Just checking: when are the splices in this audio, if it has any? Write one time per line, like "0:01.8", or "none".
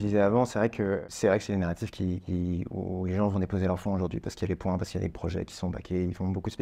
0:01.0